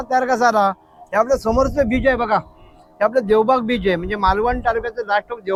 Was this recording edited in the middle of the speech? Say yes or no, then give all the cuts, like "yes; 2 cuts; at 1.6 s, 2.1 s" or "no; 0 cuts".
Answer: no; 0 cuts